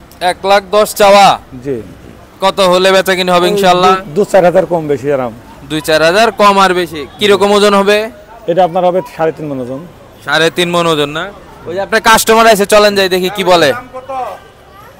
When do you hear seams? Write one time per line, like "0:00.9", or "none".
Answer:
none